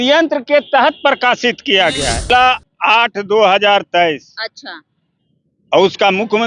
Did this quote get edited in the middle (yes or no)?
yes